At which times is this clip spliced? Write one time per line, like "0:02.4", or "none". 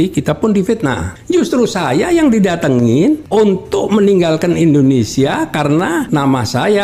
0:01.1
0:03.2
0:06.1